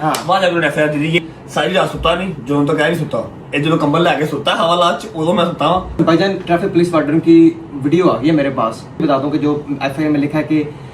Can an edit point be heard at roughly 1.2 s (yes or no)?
yes